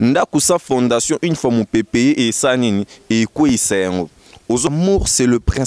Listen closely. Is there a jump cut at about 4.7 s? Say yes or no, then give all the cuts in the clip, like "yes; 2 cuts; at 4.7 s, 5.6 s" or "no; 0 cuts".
yes; 1 cut; at 4.7 s